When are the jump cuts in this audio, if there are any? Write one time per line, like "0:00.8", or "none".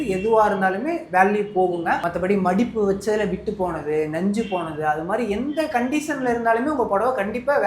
0:02.0